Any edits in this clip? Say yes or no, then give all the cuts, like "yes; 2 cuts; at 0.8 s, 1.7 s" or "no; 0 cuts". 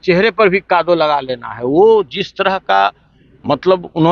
no; 0 cuts